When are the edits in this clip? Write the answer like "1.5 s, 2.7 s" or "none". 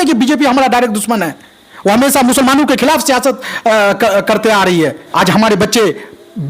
5.0 s